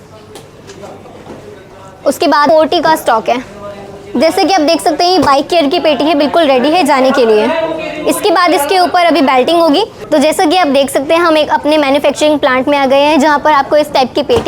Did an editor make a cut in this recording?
yes; 2 cuts; at 2.5 s, 10.0 s

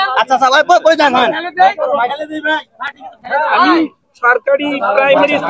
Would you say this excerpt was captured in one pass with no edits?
yes; 0 cuts

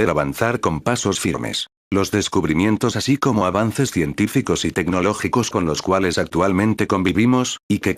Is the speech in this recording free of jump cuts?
yes; 0 cuts

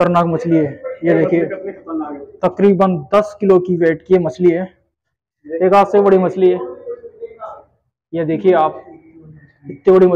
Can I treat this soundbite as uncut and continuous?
yes; 0 cuts

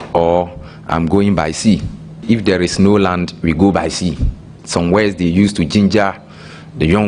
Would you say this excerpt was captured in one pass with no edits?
no; 2 cuts; at 2.2 s, 4.5 s

